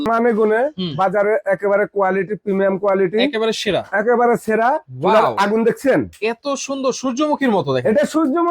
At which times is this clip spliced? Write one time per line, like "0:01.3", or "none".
0:04.9

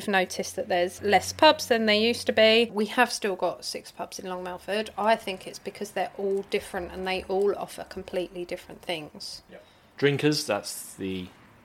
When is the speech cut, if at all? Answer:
0:01.0
0:02.7
0:09.8

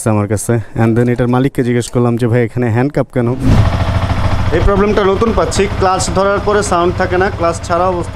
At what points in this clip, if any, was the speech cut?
0:03.5

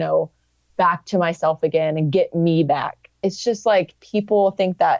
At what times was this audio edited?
0:03.2

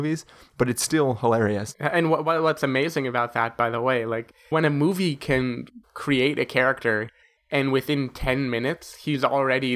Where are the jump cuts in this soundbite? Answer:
0:01.7
0:04.5

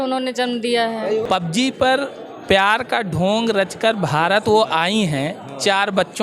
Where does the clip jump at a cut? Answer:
0:01.2

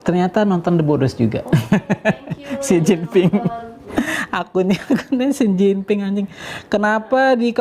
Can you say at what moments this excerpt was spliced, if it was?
0:03.8

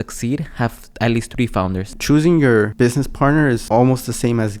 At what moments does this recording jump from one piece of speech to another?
0:01.8
0:02.7
0:03.6

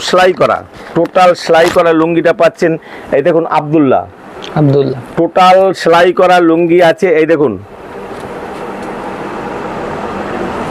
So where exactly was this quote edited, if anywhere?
none

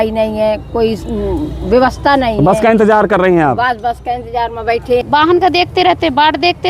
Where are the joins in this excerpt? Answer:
0:05.0

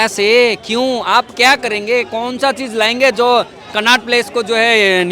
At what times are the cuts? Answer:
none

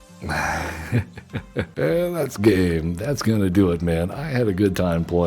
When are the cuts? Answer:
0:00.9

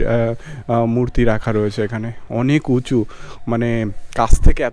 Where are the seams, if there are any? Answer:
none

